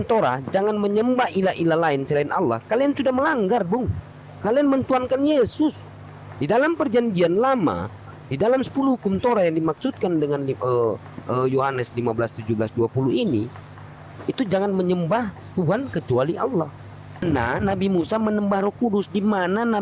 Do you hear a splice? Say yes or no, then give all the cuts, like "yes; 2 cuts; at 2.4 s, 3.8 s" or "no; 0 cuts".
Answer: yes; 1 cut; at 17.2 s